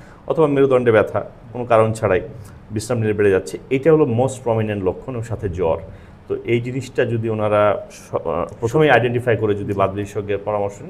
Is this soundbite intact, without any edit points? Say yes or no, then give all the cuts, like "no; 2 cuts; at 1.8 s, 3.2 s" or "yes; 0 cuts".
yes; 0 cuts